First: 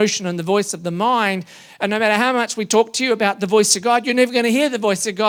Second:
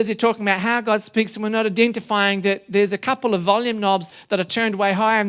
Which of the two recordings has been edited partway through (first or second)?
second